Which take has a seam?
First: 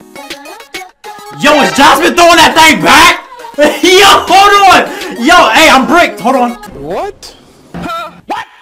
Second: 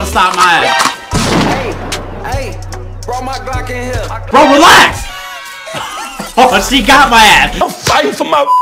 second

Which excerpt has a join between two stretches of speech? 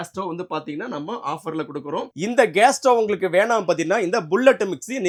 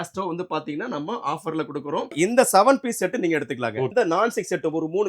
second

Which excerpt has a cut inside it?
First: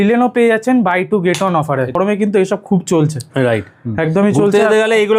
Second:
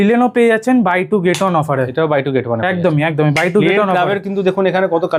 first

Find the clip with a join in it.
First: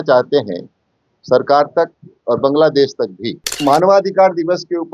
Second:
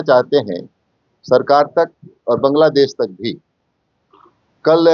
first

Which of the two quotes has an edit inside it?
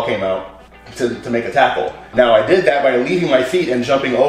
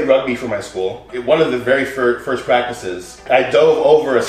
second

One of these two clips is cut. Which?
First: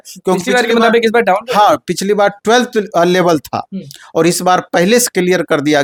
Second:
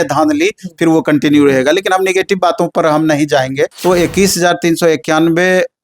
second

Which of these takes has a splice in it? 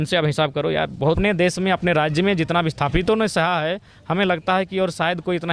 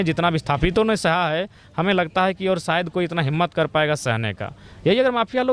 first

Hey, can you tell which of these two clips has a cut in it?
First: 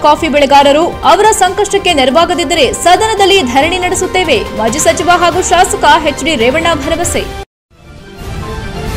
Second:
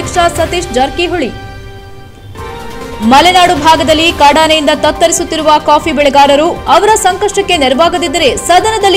first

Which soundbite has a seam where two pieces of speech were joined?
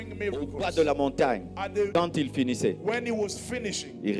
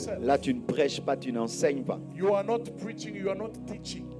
first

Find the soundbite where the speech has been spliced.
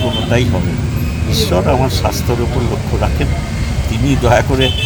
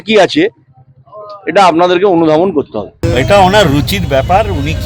second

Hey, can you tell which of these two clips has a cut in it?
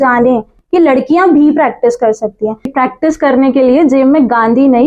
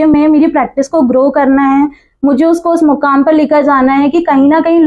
first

